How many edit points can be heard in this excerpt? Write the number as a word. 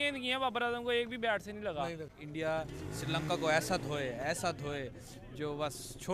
one